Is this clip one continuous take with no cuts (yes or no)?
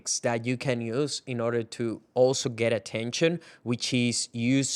yes